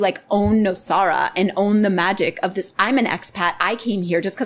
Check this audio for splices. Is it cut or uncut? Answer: uncut